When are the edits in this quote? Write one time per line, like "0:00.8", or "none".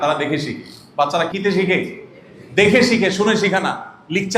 0:01.3